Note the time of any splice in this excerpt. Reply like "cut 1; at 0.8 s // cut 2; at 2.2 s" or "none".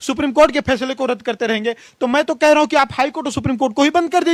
none

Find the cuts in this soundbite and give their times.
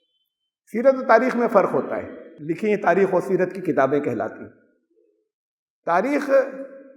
cut 1; at 2.4 s

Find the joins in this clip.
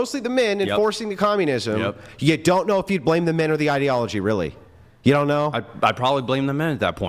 none

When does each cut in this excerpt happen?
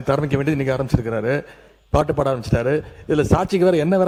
none

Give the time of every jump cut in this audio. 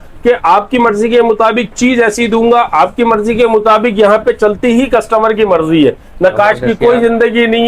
none

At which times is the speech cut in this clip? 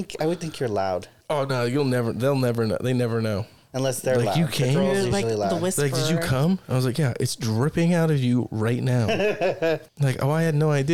cut 1; at 1.1 s // cut 2; at 3.6 s // cut 3; at 9.9 s

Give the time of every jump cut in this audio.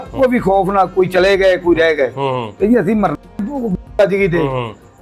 none

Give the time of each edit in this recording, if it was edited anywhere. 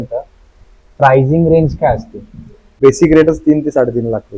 cut 1; at 2.8 s

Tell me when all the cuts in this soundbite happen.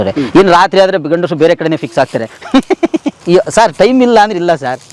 cut 1; at 3.1 s

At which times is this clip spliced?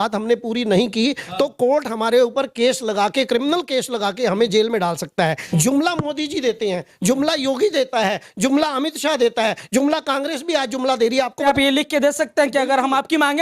cut 1; at 5.4 s // cut 2; at 11.5 s

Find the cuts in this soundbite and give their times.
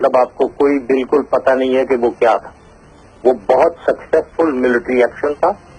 cut 1; at 1.2 s

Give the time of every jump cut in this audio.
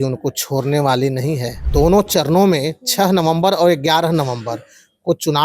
cut 1; at 1.5 s

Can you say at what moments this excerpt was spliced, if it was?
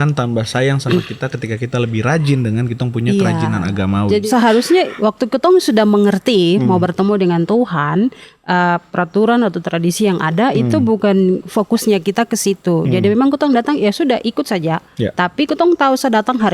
cut 1; at 4.2 s

